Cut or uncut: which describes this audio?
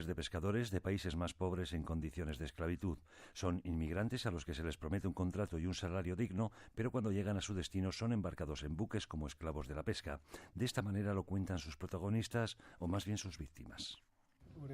cut